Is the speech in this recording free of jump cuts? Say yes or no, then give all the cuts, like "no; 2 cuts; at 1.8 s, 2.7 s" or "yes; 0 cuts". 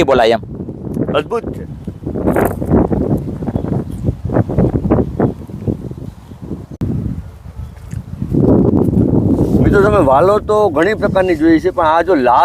no; 1 cut; at 6.7 s